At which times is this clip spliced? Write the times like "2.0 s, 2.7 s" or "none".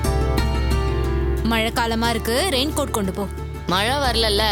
none